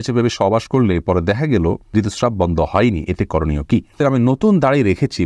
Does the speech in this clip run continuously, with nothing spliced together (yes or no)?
no